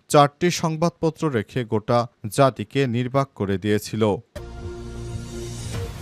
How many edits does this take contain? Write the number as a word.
one